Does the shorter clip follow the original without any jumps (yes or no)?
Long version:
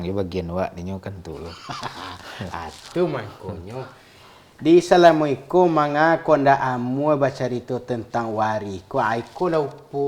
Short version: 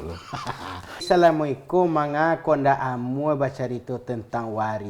no